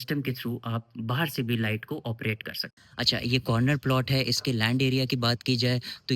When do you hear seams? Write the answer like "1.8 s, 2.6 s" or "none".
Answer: 2.9 s